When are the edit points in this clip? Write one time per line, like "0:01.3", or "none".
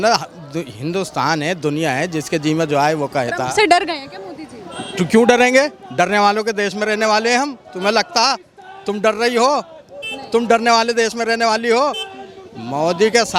none